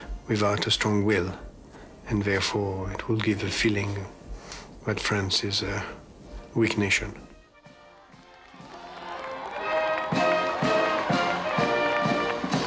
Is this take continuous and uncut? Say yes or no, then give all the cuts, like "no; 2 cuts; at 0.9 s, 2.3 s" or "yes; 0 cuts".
no; 1 cut; at 4.9 s